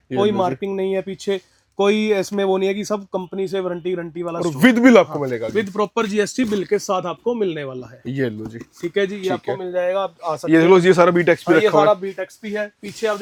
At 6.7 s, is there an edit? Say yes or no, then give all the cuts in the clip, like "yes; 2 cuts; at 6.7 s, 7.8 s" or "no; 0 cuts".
no; 0 cuts